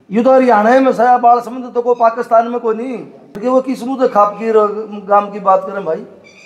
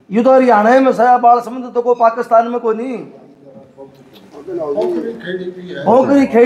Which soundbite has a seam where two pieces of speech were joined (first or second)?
first